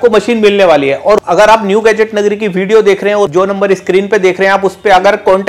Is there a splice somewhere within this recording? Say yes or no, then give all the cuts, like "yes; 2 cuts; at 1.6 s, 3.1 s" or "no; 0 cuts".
yes; 2 cuts; at 1.2 s, 3.3 s